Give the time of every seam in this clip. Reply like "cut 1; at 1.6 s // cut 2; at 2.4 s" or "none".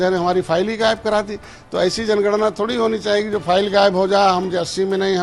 none